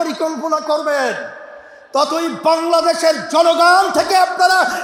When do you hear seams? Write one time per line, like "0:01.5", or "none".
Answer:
none